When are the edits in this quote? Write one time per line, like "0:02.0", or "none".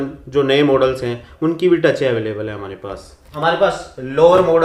0:03.2